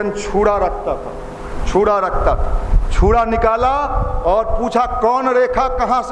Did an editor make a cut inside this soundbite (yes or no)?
no